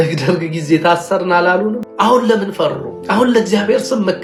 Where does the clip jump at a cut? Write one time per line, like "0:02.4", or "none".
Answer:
none